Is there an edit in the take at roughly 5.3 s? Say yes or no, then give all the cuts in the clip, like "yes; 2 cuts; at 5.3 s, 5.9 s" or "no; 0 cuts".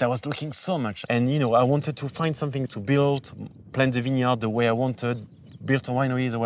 no; 2 cuts; at 1.0 s, 2.7 s